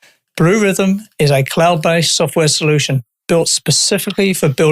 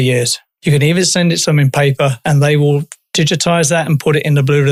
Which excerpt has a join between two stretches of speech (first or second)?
first